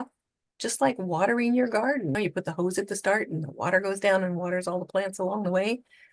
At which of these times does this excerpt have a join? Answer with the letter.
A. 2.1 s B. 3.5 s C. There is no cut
A